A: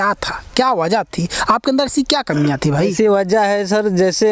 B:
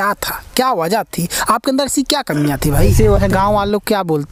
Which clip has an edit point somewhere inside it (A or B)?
B